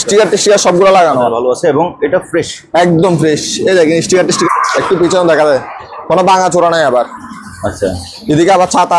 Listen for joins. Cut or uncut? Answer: cut